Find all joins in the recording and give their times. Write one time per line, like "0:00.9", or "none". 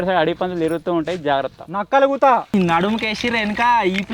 0:02.5